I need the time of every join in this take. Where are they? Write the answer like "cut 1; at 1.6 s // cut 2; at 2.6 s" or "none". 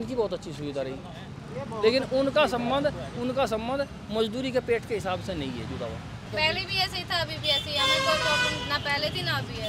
cut 1; at 6.3 s